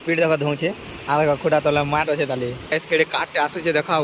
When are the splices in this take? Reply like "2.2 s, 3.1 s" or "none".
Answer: 2.9 s